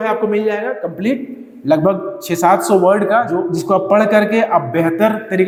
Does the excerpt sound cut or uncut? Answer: uncut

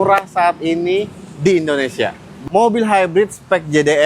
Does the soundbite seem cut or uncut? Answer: cut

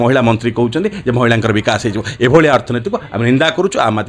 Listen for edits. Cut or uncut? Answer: uncut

